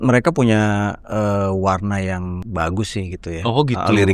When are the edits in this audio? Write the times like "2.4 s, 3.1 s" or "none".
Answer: 1.0 s, 2.4 s